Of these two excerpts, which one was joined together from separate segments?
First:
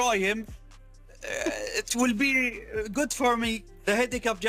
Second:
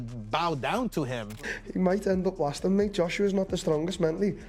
second; 1 cut; at 1.5 s

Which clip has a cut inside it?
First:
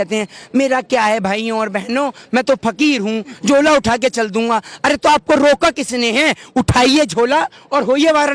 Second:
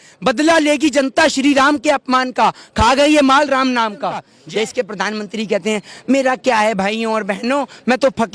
second; 1 cut; at 4.4 s

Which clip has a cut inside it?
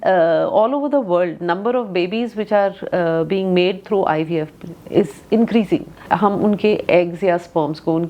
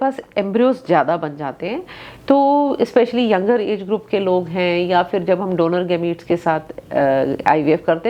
first; 1 cut; at 5.9 s

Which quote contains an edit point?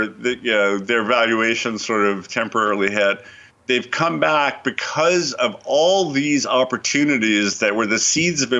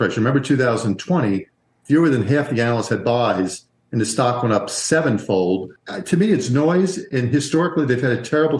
second; 1 cut; at 5.7 s

